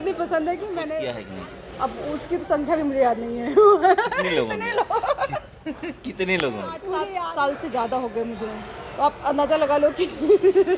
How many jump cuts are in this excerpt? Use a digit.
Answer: 2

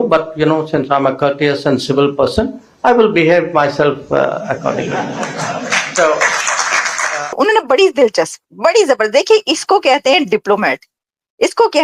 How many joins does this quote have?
1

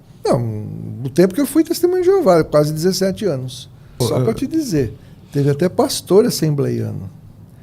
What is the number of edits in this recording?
1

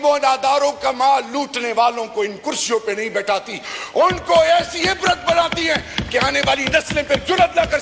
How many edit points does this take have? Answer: 0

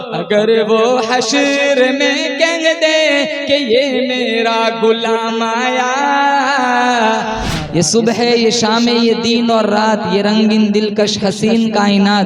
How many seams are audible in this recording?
1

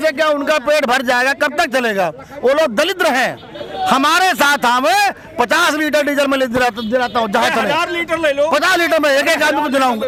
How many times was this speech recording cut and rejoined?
0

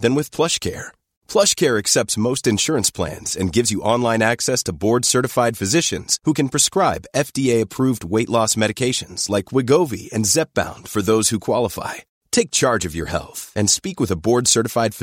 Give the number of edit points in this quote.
0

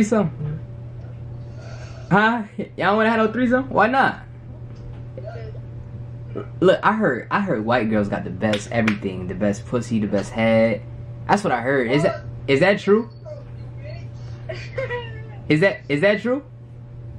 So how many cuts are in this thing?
0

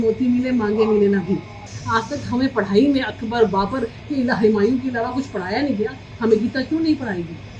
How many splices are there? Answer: 1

